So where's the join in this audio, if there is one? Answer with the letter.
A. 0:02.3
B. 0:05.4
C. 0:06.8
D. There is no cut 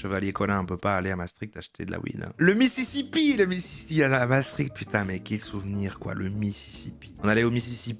A